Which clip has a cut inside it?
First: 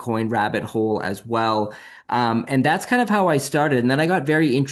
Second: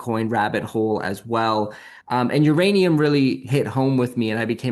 second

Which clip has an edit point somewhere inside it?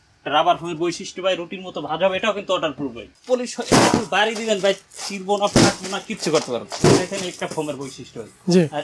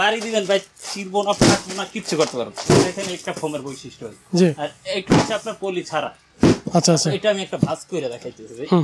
first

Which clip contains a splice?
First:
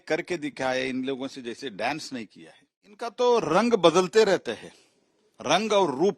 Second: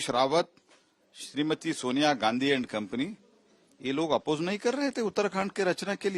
first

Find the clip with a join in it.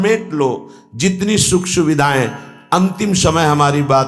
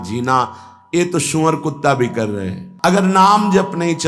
second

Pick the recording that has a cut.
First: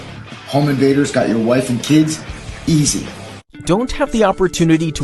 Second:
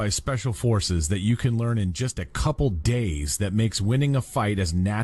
first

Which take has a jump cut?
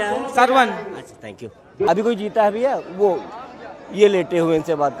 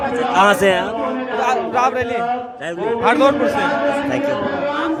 first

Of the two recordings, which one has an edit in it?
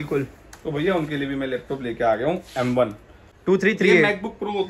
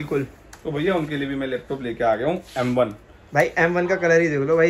first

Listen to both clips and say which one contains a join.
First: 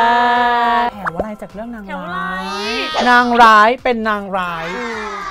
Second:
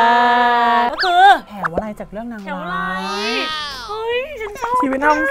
first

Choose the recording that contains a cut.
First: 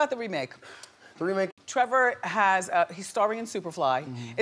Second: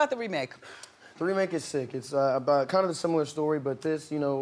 second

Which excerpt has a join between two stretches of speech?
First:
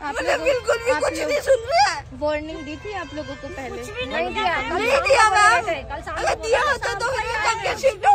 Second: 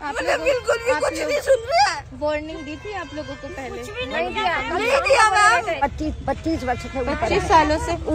second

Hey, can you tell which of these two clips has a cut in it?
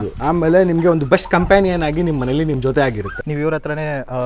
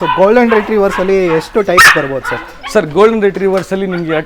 first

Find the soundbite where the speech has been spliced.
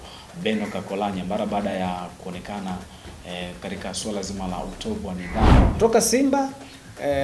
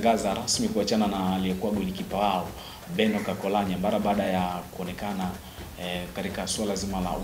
first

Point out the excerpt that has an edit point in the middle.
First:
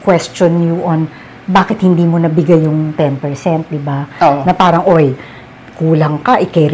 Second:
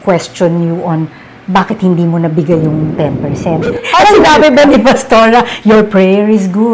second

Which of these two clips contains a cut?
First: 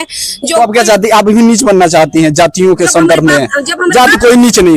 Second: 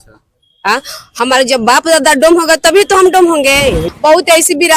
second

